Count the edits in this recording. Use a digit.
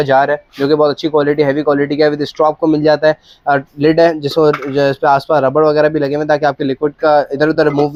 0